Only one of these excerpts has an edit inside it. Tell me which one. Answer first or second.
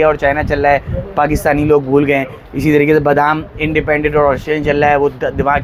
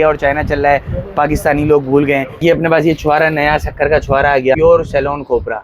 second